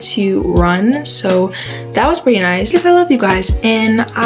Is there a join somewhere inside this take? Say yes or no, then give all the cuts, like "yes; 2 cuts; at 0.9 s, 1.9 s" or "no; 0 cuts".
yes; 1 cut; at 2.7 s